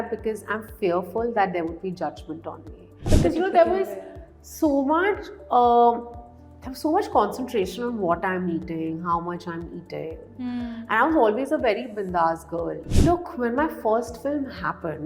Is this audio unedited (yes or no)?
no